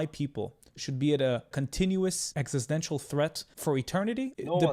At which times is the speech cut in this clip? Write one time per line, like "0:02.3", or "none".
0:01.5
0:02.3
0:03.8